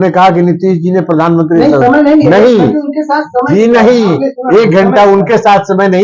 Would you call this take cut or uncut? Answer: uncut